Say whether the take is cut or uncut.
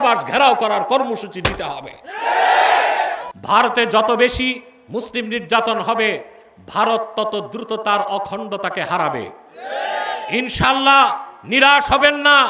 cut